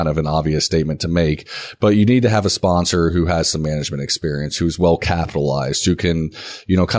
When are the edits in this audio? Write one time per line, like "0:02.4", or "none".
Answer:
none